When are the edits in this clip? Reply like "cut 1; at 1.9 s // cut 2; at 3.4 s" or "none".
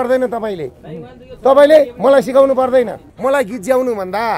cut 1; at 3.0 s